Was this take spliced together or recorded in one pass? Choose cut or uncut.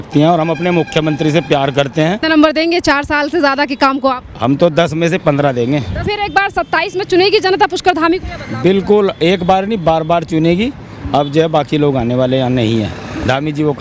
cut